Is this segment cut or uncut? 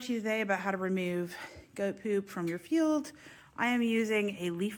uncut